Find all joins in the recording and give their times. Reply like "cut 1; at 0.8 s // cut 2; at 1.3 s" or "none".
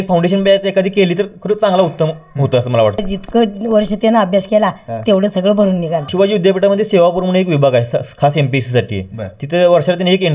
cut 1; at 3.0 s // cut 2; at 6.1 s